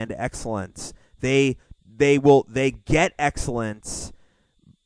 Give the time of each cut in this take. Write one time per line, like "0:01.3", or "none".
none

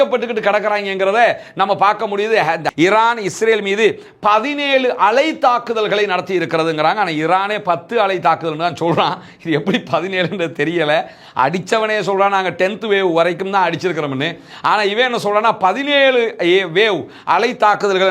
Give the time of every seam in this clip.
0:02.7

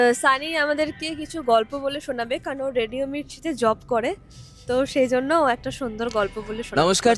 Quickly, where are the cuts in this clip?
none

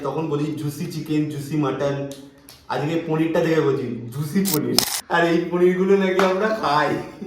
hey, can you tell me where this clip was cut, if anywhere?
0:04.9

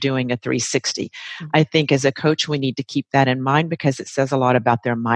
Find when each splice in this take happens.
none

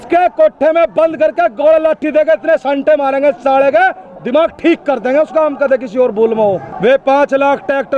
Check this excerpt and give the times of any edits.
0:06.7

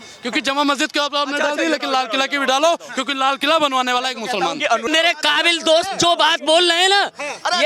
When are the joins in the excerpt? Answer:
0:04.9

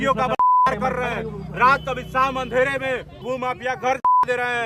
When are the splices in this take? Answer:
0:03.2

